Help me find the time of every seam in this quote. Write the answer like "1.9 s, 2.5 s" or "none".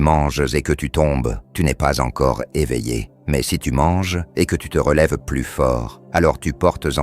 1.4 s, 3.1 s, 4.2 s, 5.9 s